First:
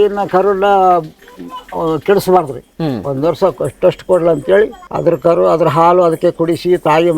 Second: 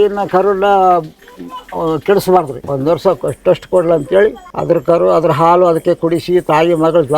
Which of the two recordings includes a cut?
second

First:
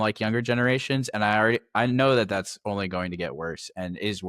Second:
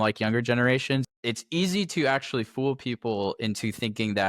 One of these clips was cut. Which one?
second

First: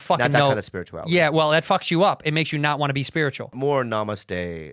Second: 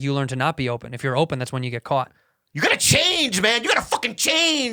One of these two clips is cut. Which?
first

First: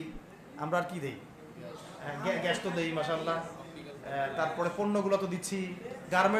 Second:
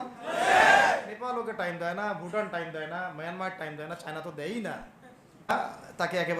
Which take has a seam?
second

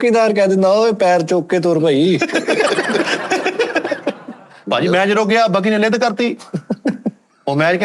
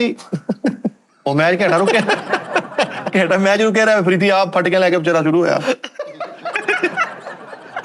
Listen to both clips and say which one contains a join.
first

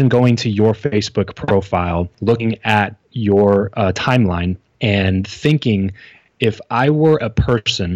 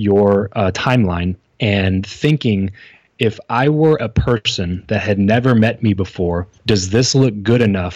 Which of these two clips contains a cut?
second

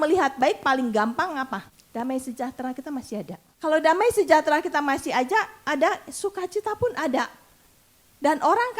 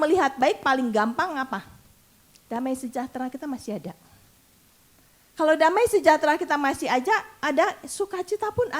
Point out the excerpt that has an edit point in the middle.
first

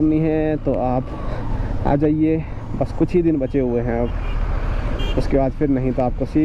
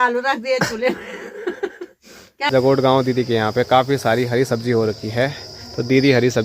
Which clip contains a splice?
second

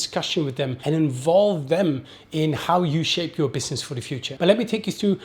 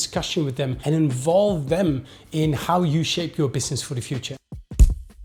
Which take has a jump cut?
first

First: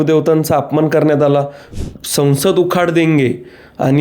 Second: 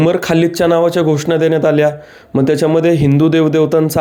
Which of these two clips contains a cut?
first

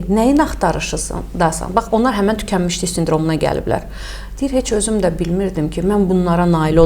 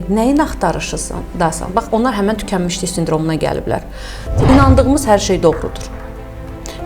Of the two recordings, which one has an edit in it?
second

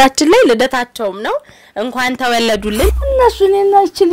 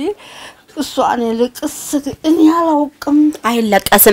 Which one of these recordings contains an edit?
first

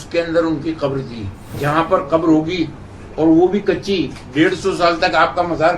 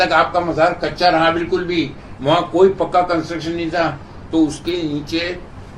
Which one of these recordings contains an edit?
first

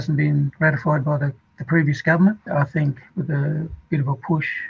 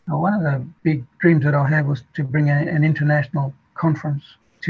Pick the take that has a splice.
first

